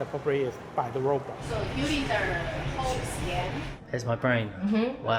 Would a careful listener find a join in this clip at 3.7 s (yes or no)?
yes